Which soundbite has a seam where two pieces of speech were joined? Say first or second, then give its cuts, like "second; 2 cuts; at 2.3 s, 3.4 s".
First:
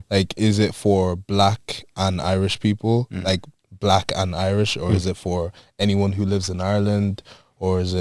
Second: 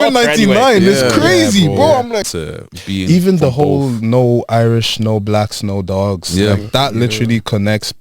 second; 1 cut; at 2.3 s